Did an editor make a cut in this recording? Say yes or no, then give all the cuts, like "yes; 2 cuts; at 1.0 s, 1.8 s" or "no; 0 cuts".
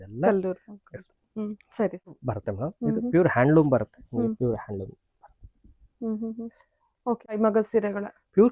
yes; 2 cuts; at 2.3 s, 7.4 s